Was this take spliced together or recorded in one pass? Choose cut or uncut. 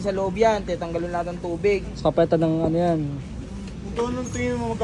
uncut